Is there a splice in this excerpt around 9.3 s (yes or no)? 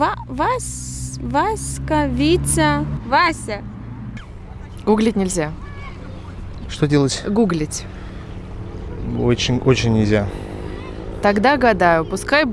no